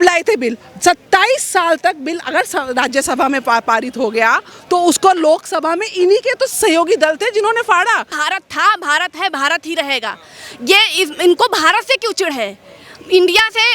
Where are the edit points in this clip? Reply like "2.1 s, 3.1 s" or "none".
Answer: 8.1 s